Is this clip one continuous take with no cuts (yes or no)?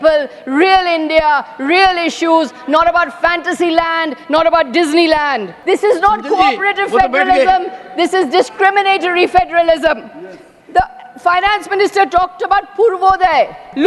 no